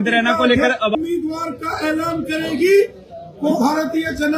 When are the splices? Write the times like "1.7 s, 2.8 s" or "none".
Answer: 1.0 s